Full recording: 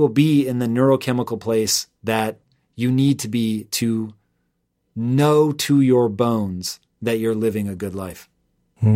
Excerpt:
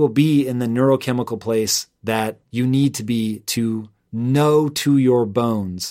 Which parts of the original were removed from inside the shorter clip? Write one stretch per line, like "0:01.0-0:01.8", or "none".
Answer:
0:02.4-0:02.7
0:04.2-0:04.8